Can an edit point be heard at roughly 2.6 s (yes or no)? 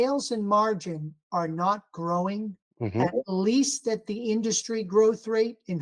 yes